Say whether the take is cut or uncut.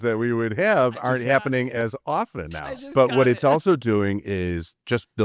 uncut